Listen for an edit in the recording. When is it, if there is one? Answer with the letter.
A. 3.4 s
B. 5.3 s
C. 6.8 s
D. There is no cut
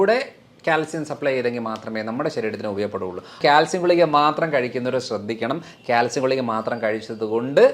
A